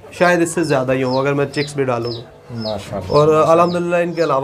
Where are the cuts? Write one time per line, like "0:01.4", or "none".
none